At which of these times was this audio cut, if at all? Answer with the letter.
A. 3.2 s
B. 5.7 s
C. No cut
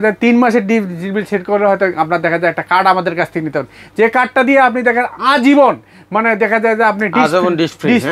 C